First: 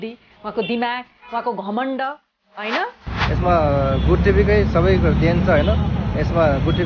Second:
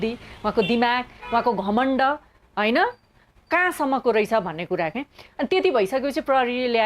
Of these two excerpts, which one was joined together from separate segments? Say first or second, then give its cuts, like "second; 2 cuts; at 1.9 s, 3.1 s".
first; 1 cut; at 3.1 s